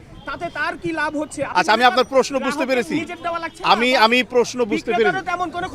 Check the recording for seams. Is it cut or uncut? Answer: cut